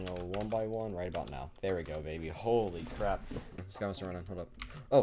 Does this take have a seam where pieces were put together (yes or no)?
yes